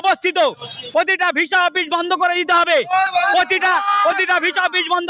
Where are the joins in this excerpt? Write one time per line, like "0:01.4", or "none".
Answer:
none